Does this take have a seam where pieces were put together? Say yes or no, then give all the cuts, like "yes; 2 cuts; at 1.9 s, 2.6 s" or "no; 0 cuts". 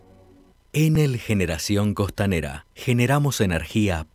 yes; 1 cut; at 1.0 s